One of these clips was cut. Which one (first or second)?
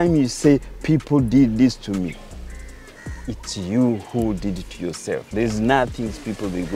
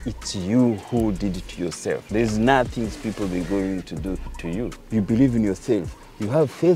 second